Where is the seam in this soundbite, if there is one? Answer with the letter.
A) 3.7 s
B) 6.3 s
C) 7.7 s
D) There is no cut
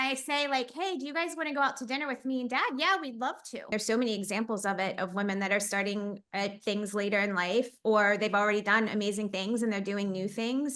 A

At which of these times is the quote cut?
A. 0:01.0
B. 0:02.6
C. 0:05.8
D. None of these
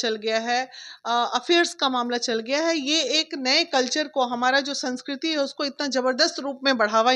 D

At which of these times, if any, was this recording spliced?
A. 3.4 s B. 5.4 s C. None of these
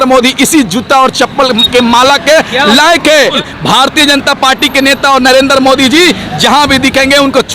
A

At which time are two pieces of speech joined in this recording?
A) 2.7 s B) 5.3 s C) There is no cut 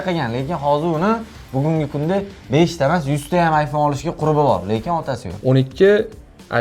B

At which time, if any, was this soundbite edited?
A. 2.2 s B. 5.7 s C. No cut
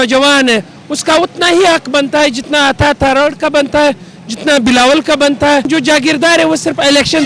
B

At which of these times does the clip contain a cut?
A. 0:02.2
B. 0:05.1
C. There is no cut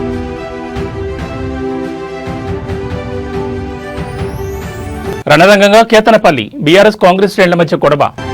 B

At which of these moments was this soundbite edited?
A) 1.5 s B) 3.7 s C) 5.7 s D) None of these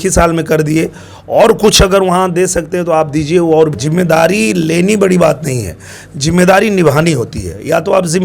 B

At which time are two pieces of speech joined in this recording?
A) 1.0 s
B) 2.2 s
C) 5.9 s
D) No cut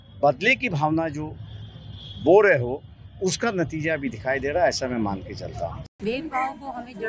C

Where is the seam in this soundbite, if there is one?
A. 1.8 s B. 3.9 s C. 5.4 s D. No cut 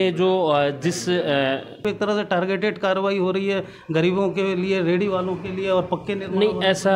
A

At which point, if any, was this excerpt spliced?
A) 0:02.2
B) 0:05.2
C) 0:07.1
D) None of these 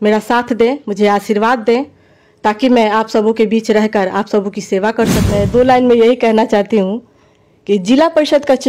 B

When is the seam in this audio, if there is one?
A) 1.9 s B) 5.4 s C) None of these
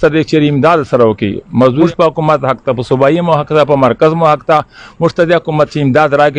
A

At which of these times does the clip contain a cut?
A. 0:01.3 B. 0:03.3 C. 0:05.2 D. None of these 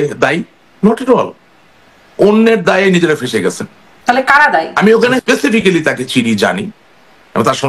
C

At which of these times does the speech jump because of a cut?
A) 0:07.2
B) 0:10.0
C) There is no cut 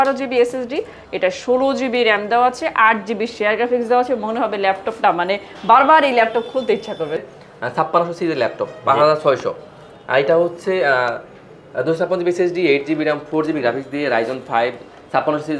A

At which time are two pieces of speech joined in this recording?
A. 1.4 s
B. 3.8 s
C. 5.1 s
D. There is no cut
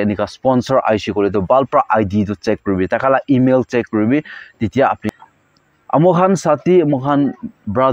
C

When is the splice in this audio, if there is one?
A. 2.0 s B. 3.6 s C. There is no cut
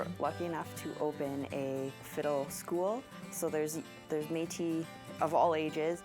A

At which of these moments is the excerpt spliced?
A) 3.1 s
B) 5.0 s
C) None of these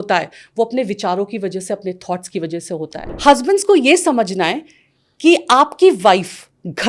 A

